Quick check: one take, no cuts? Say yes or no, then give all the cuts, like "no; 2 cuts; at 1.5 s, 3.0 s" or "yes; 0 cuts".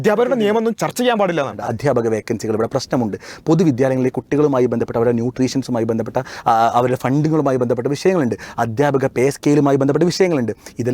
no; 2 cuts; at 0.8 s, 1.6 s